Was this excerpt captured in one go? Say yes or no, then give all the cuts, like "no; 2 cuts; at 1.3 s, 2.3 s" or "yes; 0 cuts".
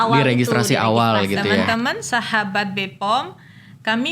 no; 1 cut; at 1.6 s